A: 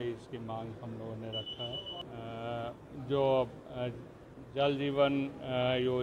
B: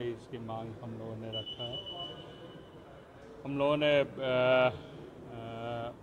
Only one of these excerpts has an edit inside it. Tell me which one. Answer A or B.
A